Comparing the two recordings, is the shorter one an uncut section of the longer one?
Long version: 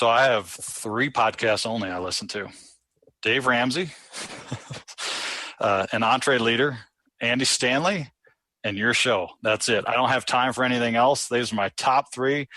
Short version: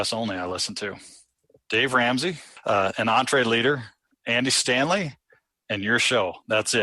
no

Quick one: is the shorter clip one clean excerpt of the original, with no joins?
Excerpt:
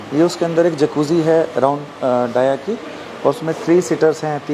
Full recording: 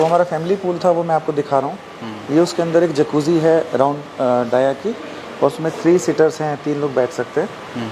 yes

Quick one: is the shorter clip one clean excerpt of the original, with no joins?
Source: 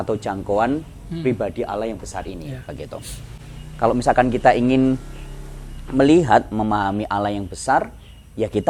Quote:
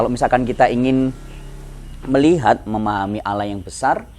yes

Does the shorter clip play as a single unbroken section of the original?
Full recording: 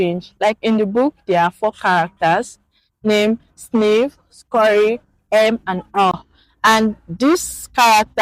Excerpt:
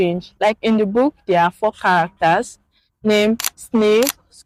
yes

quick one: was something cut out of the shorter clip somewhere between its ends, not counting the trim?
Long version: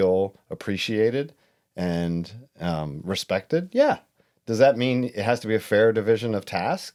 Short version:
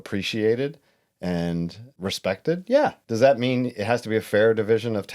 yes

